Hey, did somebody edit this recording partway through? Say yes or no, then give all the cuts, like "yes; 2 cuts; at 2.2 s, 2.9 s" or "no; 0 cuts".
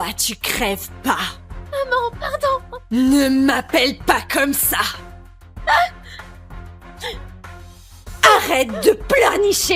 no; 0 cuts